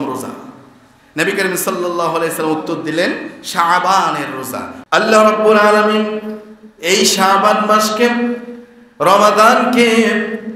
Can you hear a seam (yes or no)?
yes